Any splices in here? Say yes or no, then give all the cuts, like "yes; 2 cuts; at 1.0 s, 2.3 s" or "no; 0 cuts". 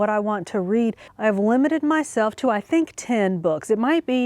yes; 1 cut; at 1.1 s